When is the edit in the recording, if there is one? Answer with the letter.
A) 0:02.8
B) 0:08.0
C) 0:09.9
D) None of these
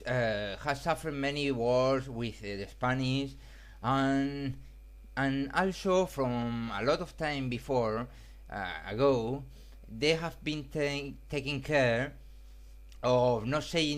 C